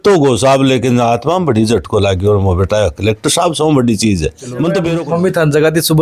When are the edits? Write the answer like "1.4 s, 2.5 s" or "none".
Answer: 4.8 s